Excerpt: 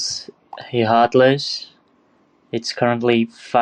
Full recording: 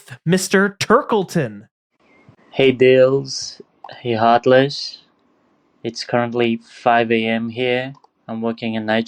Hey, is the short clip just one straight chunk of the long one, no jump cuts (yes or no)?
yes